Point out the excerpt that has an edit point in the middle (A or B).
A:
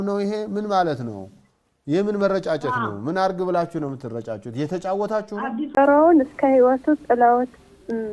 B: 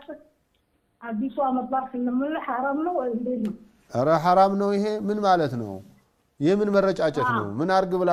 A